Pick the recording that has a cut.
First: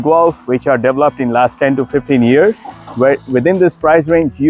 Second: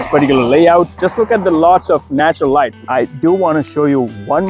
second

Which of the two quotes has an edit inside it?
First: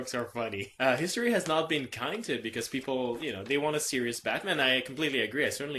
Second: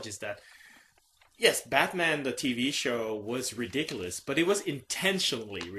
second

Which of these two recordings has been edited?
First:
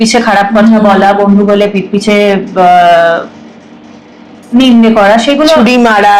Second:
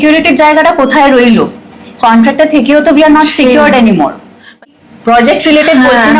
second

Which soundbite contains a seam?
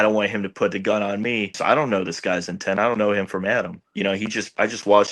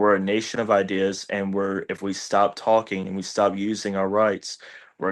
first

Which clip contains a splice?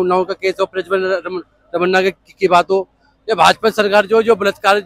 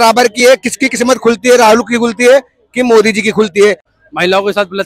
second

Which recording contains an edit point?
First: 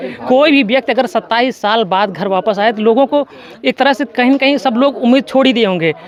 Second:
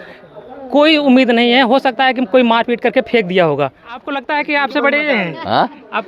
second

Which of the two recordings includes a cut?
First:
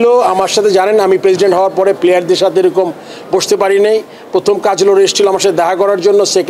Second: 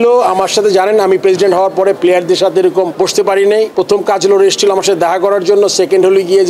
second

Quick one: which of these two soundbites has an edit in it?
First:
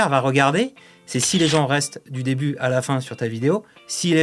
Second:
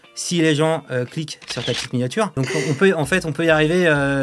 second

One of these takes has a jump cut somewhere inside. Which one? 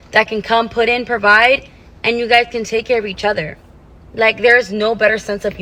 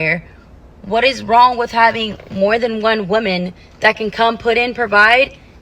second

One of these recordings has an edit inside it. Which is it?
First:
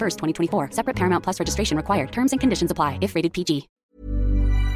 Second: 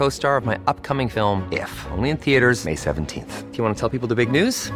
first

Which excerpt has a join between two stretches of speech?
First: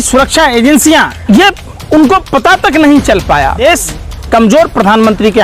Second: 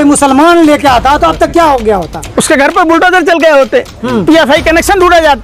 first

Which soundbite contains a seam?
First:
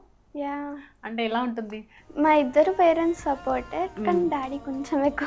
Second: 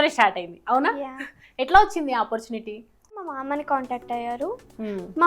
second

